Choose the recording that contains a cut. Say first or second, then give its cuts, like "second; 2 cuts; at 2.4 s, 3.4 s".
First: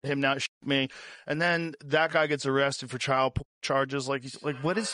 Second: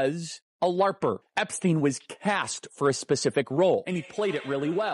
second; 2 cuts; at 1.3 s, 3.9 s